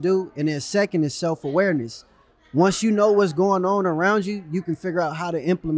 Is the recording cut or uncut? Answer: uncut